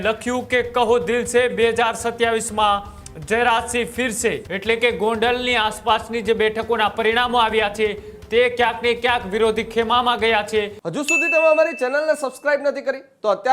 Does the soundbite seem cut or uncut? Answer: cut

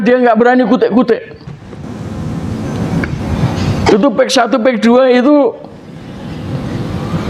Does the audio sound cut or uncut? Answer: uncut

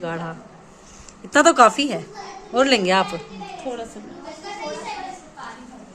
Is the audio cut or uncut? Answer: uncut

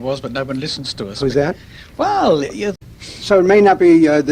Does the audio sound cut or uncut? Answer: uncut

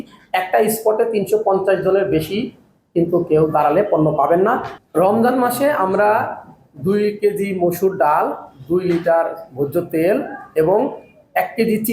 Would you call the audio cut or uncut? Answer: cut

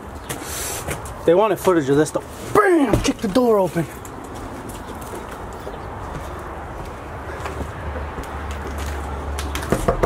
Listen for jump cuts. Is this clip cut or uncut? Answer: uncut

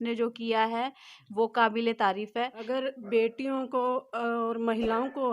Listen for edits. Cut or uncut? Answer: cut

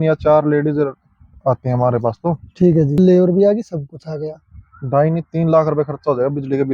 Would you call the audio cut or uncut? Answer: cut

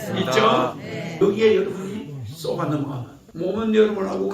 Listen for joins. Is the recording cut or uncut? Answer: cut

